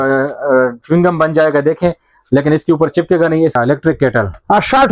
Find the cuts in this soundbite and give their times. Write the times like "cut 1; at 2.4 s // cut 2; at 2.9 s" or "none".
cut 1; at 3.6 s